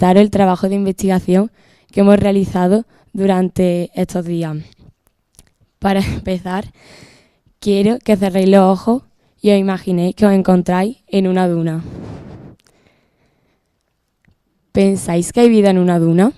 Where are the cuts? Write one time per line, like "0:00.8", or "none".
0:11.9